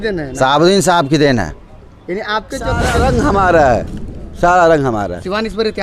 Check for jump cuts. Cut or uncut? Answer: cut